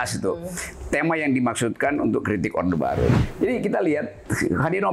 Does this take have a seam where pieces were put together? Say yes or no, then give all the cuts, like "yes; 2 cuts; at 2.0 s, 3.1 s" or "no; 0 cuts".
yes; 1 cut; at 3.2 s